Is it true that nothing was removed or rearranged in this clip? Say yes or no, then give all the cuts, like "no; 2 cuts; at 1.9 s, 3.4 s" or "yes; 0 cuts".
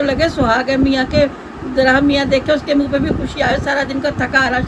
yes; 0 cuts